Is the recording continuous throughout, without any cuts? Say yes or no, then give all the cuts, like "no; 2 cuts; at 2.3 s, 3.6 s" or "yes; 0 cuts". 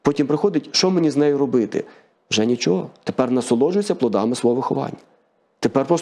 yes; 0 cuts